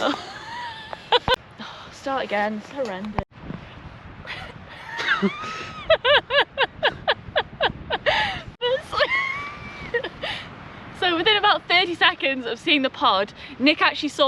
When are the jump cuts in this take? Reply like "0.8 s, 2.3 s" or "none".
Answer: 1.5 s, 3.3 s, 8.4 s